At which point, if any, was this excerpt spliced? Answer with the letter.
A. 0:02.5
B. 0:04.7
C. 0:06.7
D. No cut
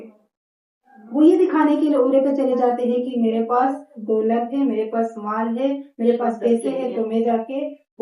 D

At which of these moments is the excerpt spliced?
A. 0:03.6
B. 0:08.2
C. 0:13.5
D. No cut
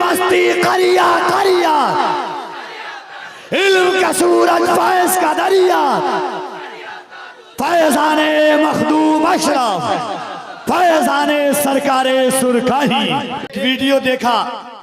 C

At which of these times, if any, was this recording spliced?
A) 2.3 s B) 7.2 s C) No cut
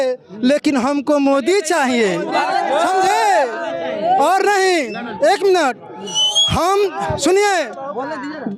C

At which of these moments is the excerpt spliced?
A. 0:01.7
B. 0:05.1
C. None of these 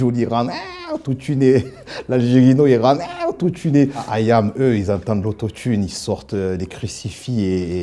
C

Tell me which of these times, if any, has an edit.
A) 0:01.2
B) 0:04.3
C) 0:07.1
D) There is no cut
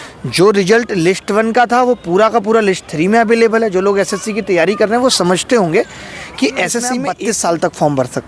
C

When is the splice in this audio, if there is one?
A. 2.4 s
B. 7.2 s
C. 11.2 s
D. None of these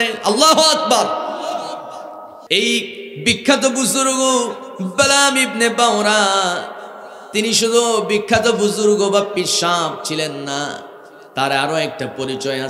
A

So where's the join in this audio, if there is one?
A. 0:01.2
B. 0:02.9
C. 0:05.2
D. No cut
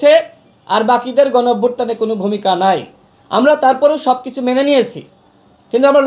D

